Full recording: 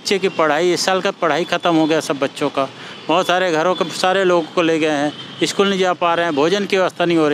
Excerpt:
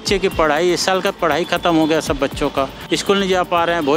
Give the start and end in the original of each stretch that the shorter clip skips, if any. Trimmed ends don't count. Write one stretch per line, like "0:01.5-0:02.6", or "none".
0:02.8-0:05.3